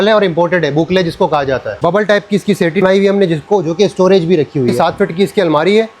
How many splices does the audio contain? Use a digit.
3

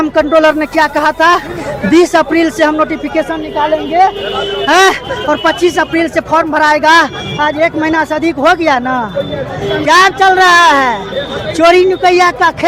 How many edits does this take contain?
0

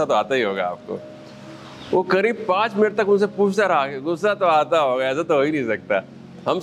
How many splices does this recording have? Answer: 0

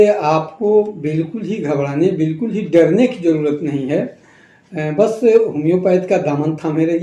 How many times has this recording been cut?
0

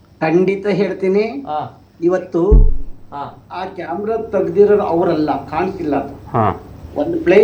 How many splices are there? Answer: 1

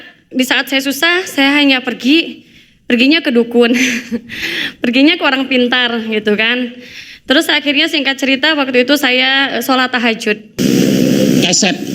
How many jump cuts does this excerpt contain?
1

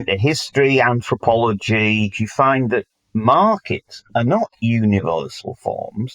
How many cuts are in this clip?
1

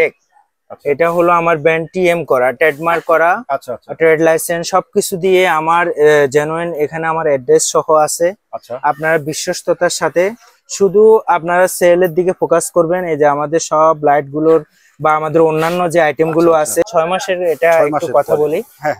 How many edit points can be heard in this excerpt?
1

